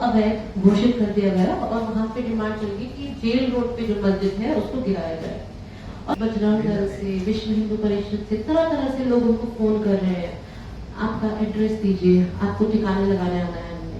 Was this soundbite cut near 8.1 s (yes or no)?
no